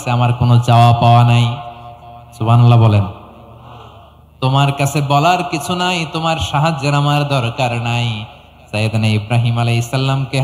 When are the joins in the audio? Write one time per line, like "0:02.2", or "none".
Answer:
none